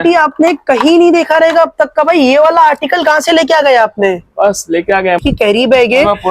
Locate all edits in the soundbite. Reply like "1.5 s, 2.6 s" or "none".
5.2 s

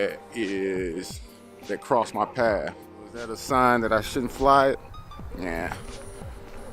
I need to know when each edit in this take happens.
3.4 s

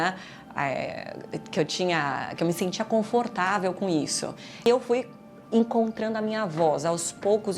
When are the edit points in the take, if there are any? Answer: 4.6 s

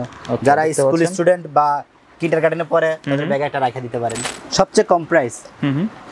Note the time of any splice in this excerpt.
4.3 s

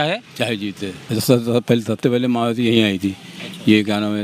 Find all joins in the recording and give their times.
1.0 s

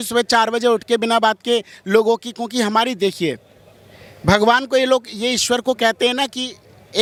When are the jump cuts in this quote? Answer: none

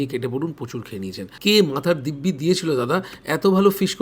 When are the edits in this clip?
1.2 s

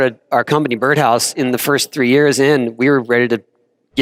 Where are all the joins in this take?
none

